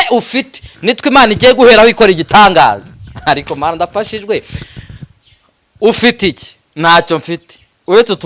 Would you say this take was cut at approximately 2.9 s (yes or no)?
no